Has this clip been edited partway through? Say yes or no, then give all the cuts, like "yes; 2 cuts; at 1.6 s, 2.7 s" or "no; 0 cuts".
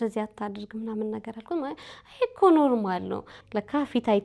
yes; 1 cut; at 3.3 s